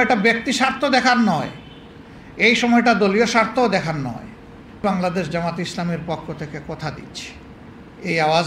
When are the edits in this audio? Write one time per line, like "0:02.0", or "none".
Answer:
0:04.8
0:07.6